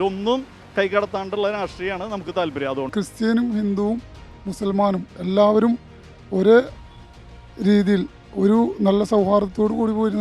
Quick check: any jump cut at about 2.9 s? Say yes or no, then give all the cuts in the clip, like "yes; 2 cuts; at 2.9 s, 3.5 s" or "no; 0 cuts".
yes; 1 cut; at 2.9 s